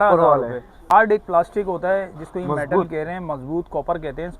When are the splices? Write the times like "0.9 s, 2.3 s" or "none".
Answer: 1.0 s